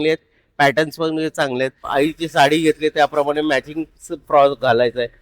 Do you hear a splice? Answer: yes; 1 cut; at 1.8 s

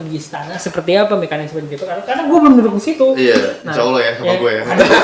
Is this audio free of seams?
yes; 0 cuts

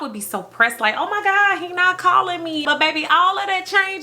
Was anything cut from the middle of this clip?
yes; 1 cut; at 2.6 s

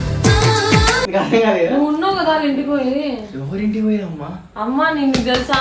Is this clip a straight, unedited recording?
no; 1 cut; at 1.0 s

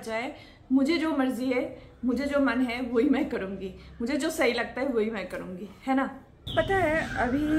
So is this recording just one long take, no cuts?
yes; 0 cuts

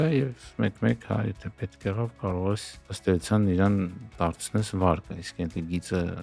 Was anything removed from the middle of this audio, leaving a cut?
no; 0 cuts

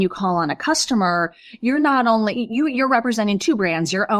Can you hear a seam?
no; 0 cuts

